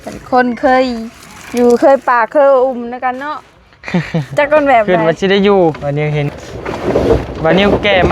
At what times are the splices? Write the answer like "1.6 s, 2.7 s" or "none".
4.9 s